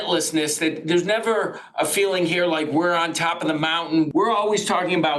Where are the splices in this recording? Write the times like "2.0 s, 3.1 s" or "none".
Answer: 4.1 s